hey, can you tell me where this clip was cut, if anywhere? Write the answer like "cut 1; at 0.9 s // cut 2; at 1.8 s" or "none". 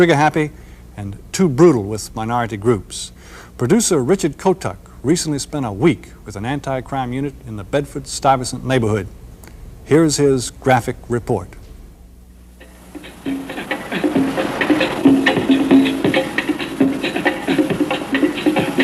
cut 1; at 16.9 s